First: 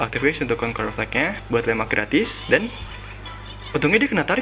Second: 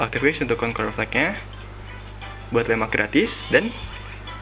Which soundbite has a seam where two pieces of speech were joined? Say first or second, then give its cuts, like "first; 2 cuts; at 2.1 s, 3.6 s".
first; 1 cut; at 1.4 s